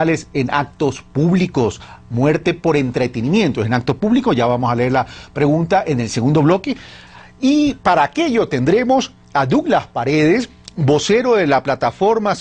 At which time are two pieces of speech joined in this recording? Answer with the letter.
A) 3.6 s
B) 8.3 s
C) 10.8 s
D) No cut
A